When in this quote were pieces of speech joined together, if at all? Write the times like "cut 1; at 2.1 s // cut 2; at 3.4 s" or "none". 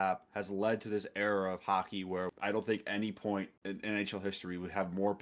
cut 1; at 2.3 s // cut 2; at 3.6 s